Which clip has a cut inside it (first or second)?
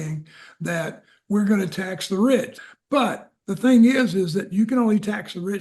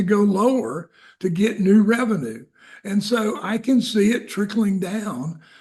first